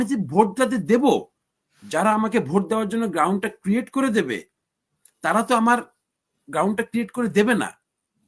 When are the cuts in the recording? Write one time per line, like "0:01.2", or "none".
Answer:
none